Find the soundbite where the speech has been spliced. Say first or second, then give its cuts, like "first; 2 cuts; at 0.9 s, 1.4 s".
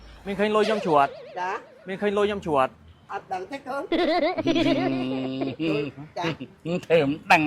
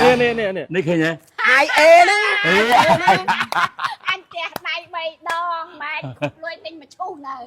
first; 1 cut; at 3.1 s